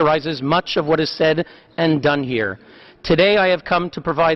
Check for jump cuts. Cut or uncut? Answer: cut